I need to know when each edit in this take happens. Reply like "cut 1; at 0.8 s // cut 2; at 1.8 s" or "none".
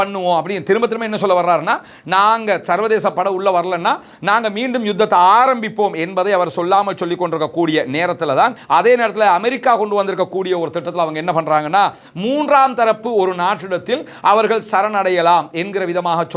cut 1; at 8.6 s